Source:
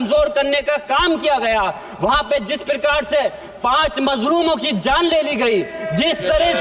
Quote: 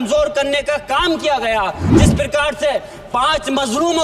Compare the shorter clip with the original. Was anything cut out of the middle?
yes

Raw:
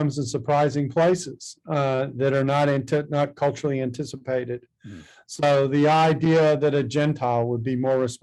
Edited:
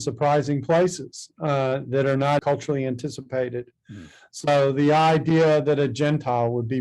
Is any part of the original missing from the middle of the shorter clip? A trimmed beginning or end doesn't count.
yes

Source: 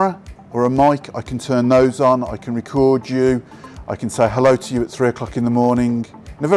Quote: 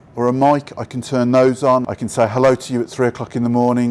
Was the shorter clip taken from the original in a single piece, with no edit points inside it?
no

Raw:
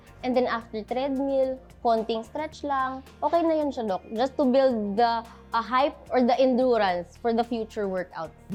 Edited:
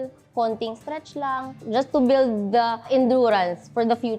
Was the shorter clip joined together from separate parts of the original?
yes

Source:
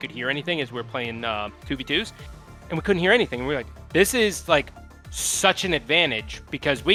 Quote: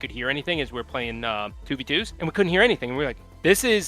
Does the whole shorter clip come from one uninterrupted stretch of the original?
no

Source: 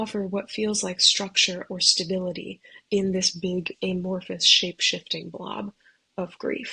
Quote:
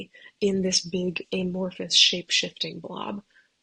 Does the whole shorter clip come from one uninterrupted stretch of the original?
yes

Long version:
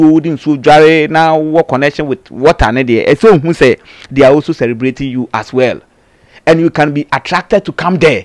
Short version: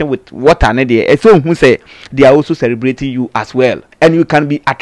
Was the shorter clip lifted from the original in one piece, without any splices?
no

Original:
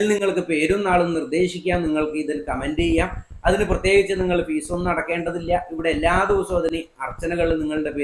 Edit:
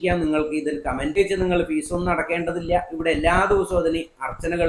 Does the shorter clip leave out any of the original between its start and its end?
yes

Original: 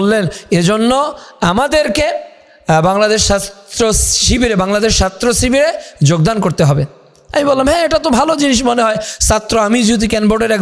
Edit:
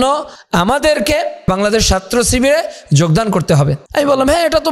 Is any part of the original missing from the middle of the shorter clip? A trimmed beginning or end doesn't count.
yes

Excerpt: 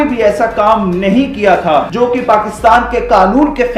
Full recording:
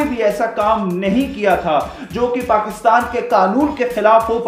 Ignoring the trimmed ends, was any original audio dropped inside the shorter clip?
yes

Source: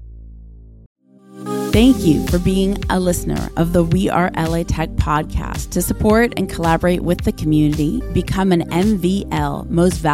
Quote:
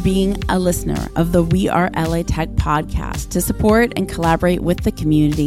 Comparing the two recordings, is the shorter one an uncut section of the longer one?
yes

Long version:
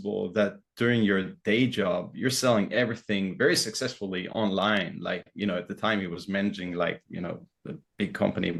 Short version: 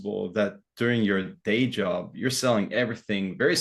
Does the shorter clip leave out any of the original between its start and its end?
no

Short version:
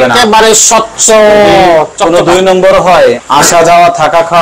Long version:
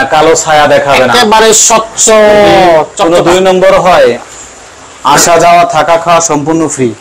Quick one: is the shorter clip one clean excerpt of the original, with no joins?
no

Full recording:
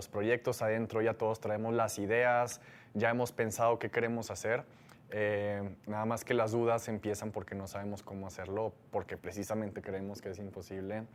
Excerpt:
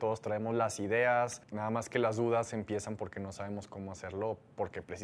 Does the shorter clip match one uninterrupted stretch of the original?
no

